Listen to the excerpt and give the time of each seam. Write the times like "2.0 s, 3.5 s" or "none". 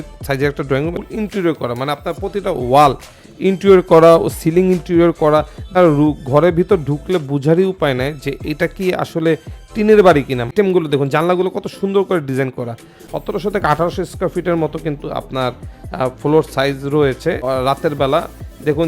1.0 s, 5.8 s, 10.5 s, 13.1 s, 17.4 s

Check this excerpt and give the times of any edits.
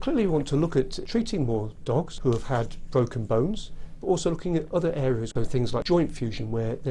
1.0 s, 2.1 s, 5.4 s

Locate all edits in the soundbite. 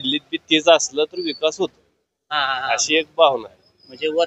none

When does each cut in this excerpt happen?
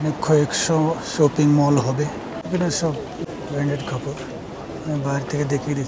2.4 s, 3.3 s

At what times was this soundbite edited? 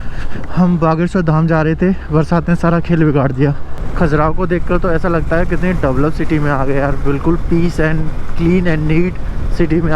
3.9 s

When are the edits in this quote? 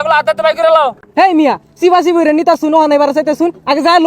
1.0 s

